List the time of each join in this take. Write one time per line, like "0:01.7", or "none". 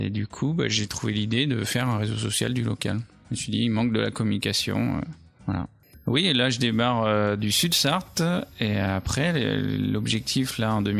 0:05.9

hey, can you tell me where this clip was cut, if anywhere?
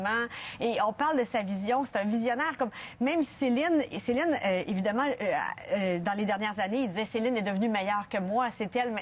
none

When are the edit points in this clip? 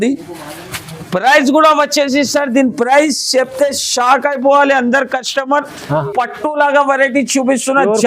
0:06.1

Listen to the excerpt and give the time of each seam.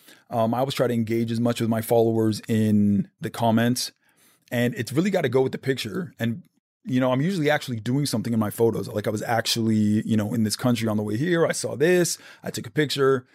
0:03.2

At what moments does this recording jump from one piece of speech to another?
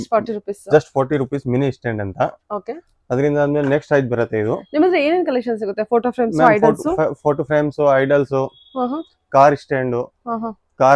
none

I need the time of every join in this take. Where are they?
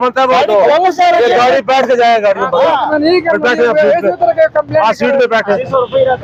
none

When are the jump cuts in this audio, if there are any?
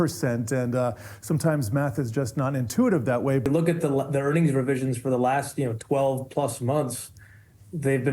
0:03.4

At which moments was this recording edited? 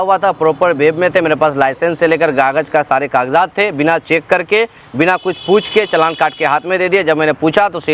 none

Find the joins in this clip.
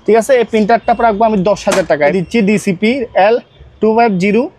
0:02.1

